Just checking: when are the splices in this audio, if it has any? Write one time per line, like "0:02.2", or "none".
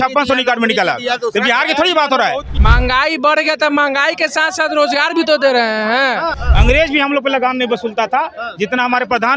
0:02.5
0:06.4